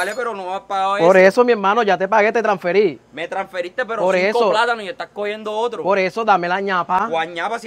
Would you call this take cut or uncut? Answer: uncut